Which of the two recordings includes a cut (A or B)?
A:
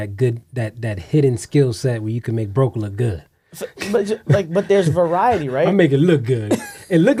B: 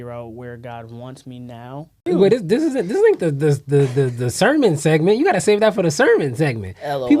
B